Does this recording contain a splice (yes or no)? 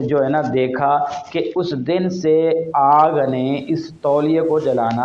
no